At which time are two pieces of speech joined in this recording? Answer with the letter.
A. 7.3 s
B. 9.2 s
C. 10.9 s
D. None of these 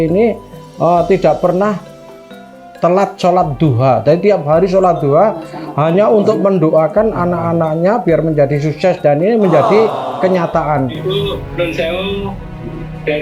C